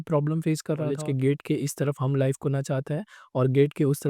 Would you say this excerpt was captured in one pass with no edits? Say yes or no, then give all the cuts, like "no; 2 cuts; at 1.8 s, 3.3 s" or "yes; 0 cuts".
no; 1 cut; at 1.0 s